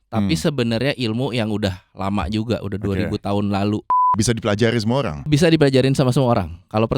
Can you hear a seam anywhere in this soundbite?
yes; 2 cuts; at 4.1 s, 5.3 s

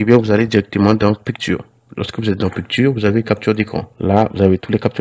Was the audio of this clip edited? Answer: yes; 1 cut; at 3.8 s

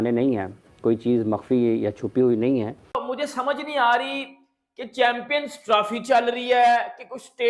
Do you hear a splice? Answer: yes; 1 cut; at 3.0 s

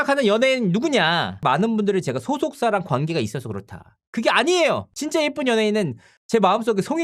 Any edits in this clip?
yes; 1 cut; at 1.4 s

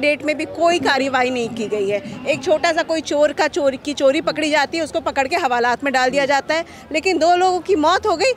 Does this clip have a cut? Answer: no; 0 cuts

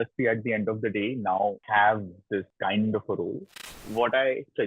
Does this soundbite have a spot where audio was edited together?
yes; 3 cuts; at 1.6 s, 2.5 s, 3.9 s

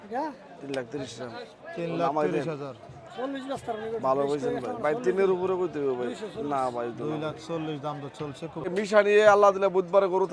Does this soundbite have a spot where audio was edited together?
yes; 1 cut; at 8.7 s

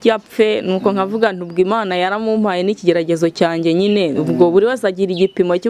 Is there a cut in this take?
no; 0 cuts

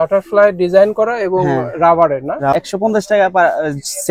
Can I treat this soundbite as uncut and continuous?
no; 1 cut; at 2.6 s

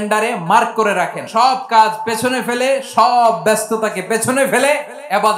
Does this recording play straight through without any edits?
no; 1 cut; at 1.2 s

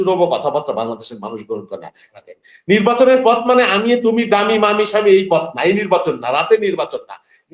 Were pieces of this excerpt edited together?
yes; 1 cut; at 2.1 s

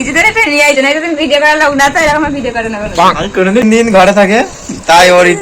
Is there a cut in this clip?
yes; 1 cut; at 3.6 s

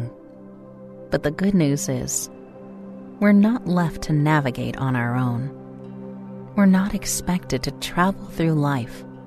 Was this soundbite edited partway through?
no; 0 cuts

